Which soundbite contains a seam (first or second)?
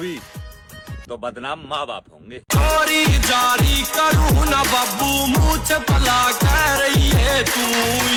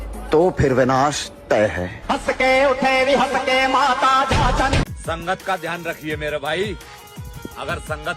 second